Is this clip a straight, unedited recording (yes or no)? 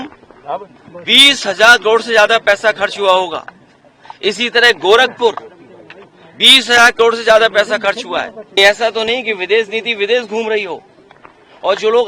no